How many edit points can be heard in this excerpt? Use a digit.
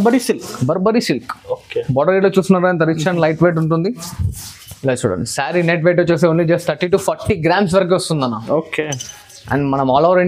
0